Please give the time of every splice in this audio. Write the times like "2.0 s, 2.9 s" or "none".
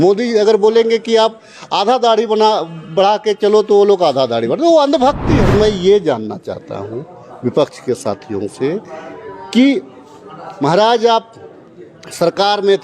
5.4 s